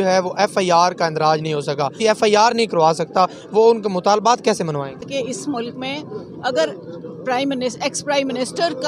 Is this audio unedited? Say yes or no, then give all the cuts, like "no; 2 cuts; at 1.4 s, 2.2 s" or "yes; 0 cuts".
no; 2 cuts; at 1.9 s, 5.1 s